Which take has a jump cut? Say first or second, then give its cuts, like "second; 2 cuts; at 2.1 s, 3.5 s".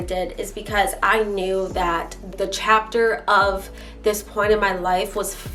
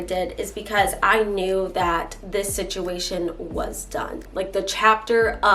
first; 1 cut; at 2.3 s